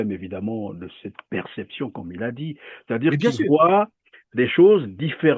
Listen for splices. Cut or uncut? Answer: uncut